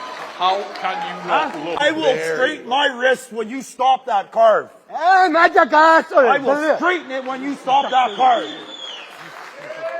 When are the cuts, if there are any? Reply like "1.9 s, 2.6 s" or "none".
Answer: 1.8 s